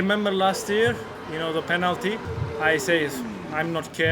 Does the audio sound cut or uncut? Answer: cut